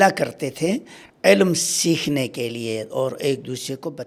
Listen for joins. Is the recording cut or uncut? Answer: uncut